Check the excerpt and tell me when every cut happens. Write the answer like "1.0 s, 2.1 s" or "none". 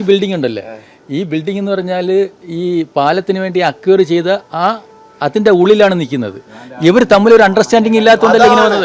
none

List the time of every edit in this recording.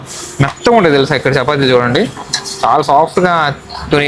none

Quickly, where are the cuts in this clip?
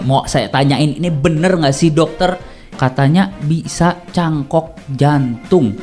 2.7 s

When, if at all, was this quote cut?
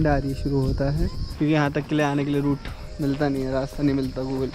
1.2 s

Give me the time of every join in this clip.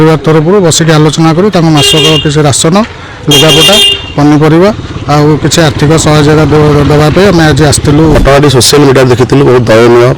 8.2 s

